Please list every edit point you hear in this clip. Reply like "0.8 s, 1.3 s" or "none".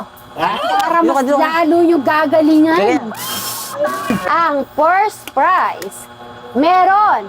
4.1 s